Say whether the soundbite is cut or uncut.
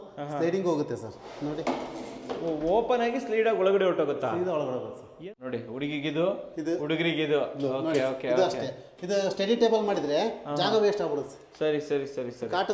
cut